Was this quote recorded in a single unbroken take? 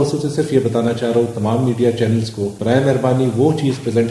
no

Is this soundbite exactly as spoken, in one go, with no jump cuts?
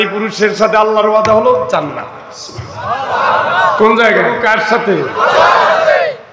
no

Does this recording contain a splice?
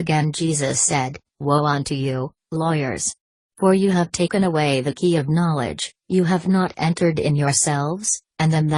no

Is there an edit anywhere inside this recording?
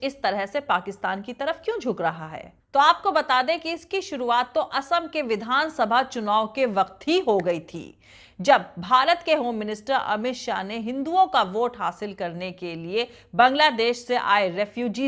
no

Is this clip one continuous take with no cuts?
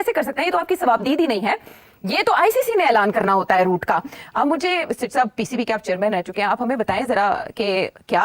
yes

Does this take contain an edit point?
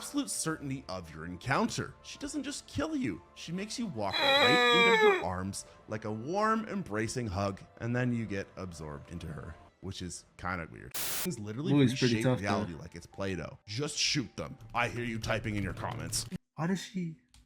yes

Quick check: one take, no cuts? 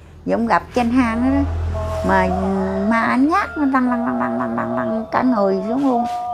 yes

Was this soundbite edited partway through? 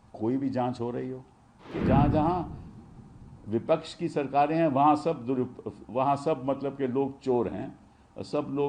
yes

